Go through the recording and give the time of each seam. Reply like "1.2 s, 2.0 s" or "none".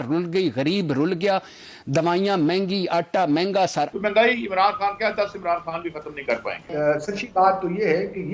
3.9 s, 6.7 s

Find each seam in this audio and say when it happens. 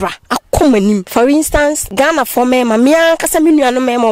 1.1 s, 1.8 s

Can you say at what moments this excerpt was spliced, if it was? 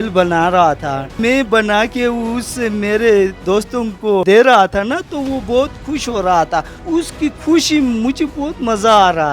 1.2 s, 4.2 s, 6.8 s

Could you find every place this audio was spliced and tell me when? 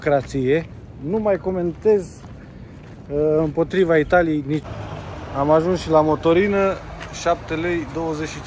4.8 s

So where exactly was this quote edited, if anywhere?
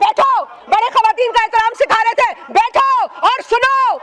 none

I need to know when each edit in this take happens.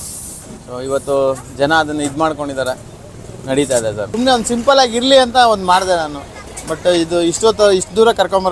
4.1 s

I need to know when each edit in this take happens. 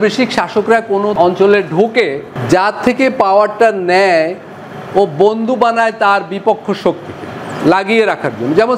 1.1 s, 2.3 s

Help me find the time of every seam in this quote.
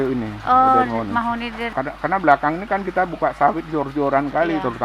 1.8 s

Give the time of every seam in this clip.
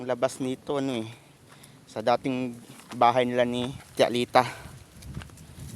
3.8 s

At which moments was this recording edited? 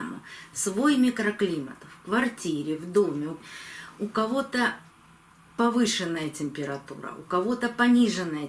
3.3 s

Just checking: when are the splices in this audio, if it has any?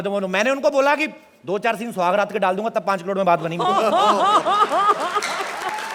none

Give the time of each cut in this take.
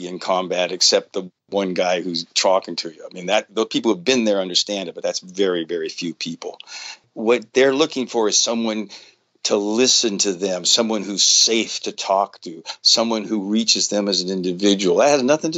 7.0 s

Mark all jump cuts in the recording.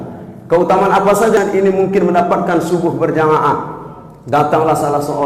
1.3 s

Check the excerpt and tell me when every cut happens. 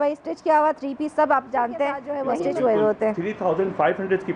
2.1 s

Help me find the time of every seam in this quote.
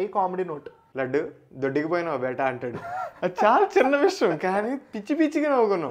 none

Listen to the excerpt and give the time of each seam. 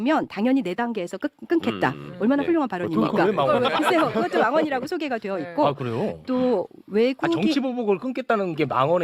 none

